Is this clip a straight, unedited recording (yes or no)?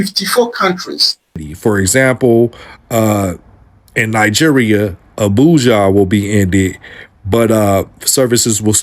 no